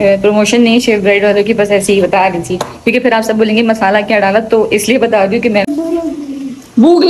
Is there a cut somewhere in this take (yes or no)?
yes